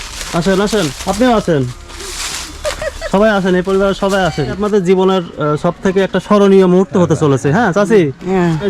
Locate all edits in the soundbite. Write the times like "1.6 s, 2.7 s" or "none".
1.0 s, 4.6 s